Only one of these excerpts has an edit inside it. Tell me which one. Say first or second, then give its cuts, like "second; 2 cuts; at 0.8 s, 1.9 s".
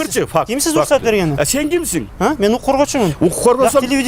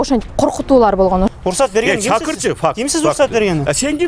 second; 1 cut; at 1.3 s